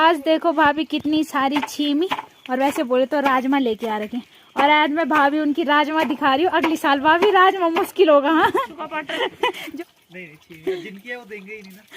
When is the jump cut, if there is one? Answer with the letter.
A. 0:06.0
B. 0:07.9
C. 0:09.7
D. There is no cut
C